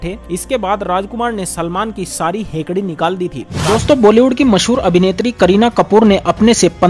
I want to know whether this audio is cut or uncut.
cut